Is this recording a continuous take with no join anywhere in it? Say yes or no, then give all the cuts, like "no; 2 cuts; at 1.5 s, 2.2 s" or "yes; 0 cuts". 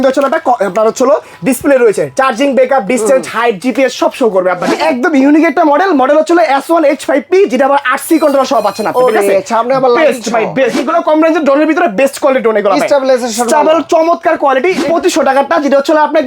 no; 3 cuts; at 4.8 s, 10.8 s, 14.8 s